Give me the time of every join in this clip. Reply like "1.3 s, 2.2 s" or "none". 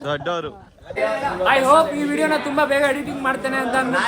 1.0 s